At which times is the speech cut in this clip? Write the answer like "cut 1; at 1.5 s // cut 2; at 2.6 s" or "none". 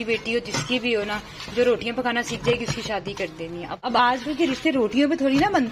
cut 1; at 3.8 s